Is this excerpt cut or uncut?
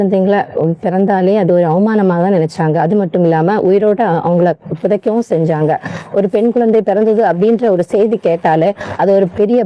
uncut